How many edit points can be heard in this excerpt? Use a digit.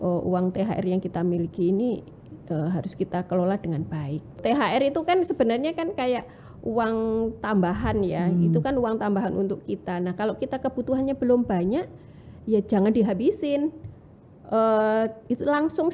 1